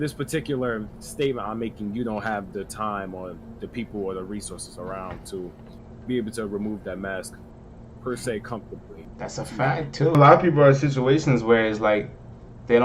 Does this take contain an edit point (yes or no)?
yes